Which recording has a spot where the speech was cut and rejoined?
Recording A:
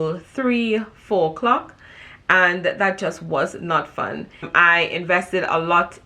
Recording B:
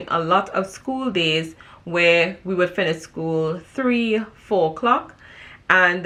A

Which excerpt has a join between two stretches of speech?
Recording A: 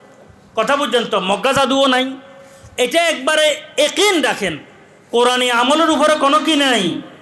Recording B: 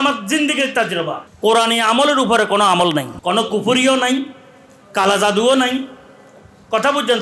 B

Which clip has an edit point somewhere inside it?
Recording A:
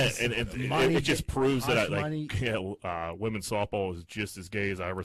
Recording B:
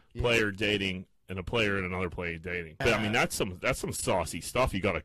B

